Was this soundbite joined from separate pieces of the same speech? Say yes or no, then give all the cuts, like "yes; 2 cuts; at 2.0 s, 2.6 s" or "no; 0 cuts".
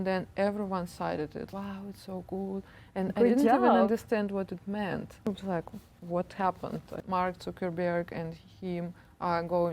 yes; 3 cuts; at 1.5 s, 5.3 s, 6.9 s